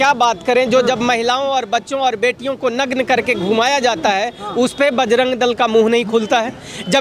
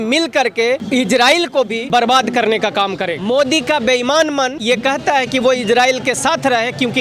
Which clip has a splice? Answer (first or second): second